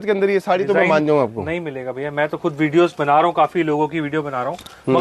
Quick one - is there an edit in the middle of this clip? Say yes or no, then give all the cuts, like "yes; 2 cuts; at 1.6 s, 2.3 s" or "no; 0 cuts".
no; 0 cuts